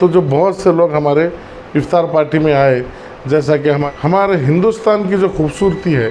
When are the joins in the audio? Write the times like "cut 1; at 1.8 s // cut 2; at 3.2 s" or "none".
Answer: cut 1; at 3.8 s